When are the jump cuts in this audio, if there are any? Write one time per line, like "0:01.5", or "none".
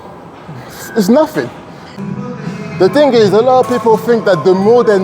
0:01.8